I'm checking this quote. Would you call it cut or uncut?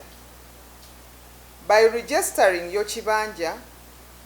cut